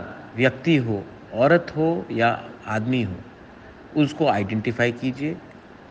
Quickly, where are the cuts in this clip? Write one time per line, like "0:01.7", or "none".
none